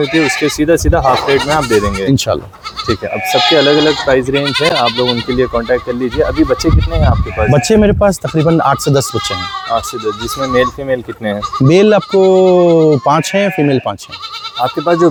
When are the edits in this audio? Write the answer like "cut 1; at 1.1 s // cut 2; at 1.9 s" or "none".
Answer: none